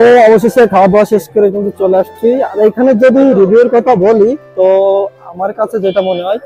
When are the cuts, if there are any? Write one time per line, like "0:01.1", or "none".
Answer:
none